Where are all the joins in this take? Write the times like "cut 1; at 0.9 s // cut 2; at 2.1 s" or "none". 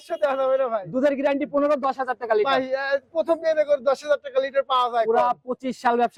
none